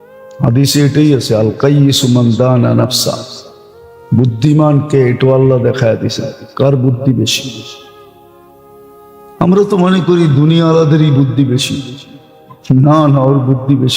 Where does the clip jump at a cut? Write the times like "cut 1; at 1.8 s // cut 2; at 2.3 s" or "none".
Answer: cut 1; at 7.9 s // cut 2; at 9.4 s